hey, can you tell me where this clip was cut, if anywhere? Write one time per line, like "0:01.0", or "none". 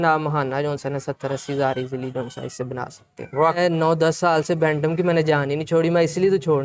0:03.6